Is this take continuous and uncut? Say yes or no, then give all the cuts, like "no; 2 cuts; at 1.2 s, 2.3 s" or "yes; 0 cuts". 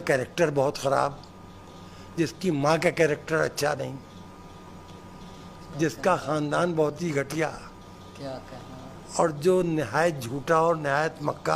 yes; 0 cuts